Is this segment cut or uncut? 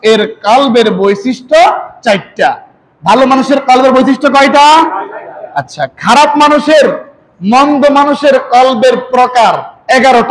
uncut